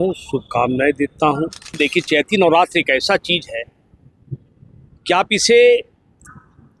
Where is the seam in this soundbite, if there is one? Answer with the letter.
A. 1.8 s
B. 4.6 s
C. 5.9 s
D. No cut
A